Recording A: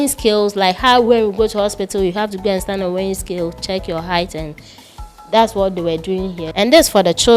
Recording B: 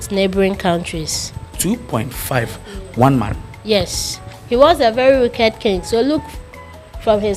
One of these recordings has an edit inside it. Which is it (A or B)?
A